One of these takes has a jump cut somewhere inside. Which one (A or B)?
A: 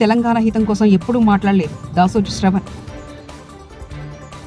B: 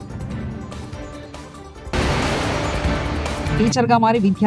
B